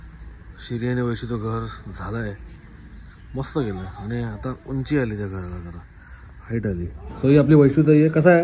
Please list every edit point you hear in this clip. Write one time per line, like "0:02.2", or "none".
0:07.0

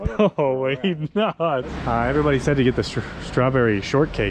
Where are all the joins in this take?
0:01.7

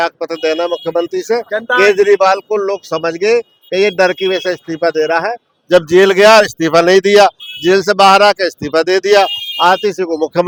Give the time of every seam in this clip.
none

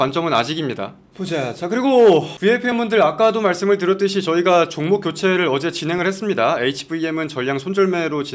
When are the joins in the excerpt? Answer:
0:01.1

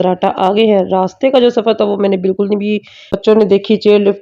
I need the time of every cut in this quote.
0:03.1

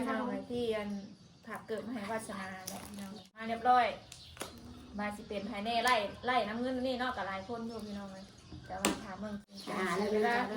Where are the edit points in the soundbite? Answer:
0:03.4
0:09.4

